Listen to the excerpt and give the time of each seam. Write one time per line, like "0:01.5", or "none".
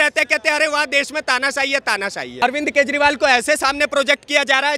0:02.4